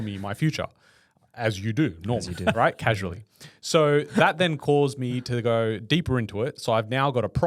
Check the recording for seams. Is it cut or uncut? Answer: uncut